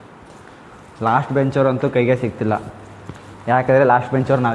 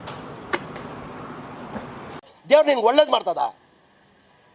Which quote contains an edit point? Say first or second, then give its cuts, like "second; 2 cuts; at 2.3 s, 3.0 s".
second; 1 cut; at 2.3 s